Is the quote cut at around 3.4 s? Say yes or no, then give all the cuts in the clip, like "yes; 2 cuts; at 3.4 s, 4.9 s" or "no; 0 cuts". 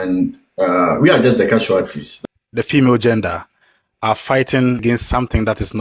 no; 2 cuts; at 2.0 s, 4.8 s